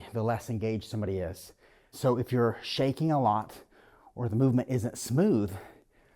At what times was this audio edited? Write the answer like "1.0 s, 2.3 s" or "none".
1.9 s